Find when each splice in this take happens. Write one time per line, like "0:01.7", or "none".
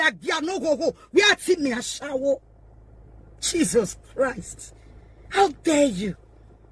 none